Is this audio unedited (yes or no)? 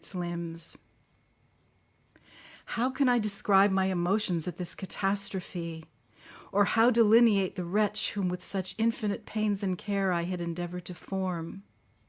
no